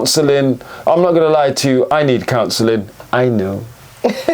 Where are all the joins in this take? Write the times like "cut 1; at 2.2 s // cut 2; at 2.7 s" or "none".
cut 1; at 1.9 s